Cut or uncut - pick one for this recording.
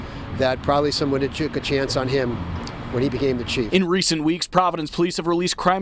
cut